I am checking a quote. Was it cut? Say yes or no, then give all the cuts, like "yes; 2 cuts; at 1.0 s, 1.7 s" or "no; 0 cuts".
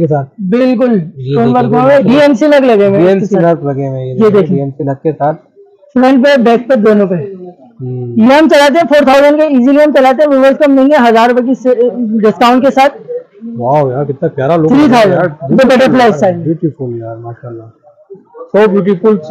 no; 0 cuts